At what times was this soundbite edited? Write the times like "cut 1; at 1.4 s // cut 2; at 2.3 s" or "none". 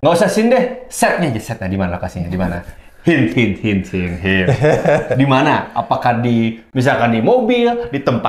none